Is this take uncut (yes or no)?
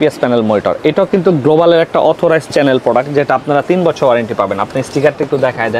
yes